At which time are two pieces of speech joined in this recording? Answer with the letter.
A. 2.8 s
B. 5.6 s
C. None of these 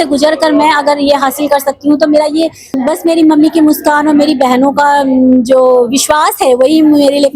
A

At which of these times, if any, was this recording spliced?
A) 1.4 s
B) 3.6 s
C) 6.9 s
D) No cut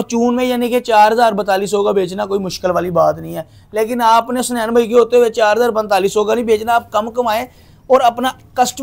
D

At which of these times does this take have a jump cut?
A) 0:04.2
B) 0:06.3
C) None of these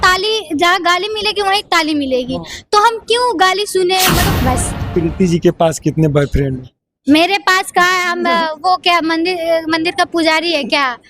A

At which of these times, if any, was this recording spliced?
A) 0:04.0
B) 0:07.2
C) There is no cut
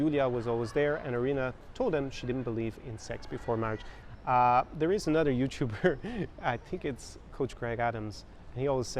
A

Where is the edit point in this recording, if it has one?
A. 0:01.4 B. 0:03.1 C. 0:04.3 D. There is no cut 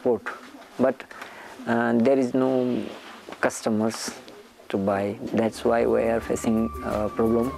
D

